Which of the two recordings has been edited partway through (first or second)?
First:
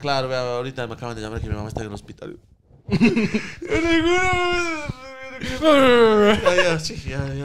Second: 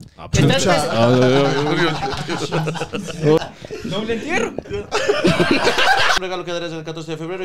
second